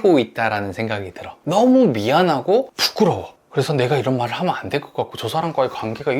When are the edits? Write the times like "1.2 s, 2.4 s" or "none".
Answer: 1.3 s